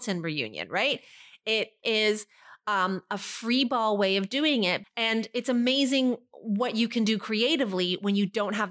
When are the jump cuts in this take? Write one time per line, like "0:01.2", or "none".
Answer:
0:01.8
0:04.9